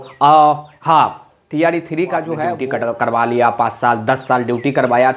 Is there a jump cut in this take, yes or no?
yes